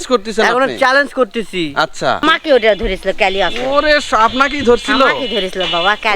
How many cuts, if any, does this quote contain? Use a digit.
1